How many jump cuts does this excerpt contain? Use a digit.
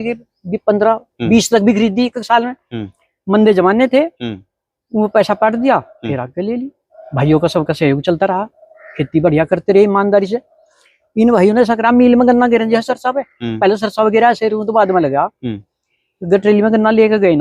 0